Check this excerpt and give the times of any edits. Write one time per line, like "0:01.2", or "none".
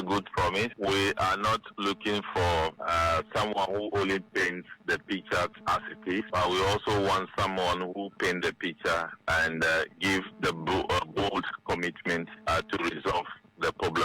0:02.8
0:06.3